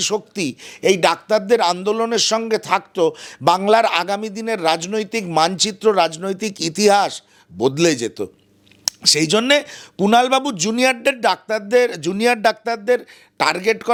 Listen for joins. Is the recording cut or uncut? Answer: uncut